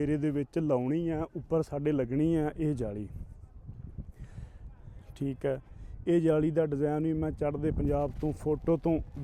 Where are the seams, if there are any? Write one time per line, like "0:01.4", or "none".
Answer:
none